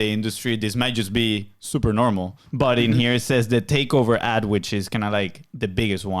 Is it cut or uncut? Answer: cut